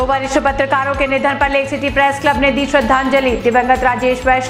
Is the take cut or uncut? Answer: uncut